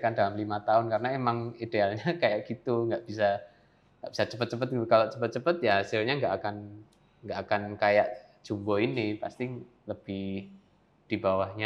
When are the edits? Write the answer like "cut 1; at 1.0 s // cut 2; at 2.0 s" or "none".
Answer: none